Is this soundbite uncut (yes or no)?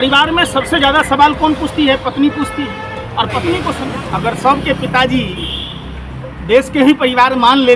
no